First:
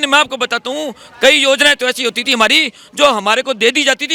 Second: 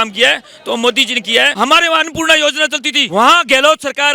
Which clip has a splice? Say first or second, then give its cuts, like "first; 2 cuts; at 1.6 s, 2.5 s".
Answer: second; 2 cuts; at 1.5 s, 2.9 s